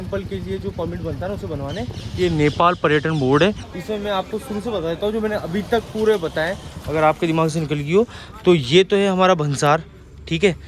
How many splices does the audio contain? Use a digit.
1